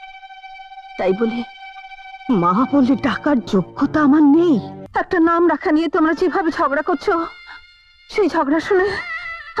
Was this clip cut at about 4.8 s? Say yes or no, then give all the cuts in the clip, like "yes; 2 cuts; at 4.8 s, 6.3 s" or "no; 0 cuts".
yes; 1 cut; at 4.8 s